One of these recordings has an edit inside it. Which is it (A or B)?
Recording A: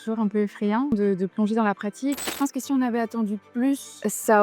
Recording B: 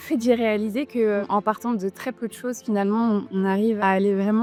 A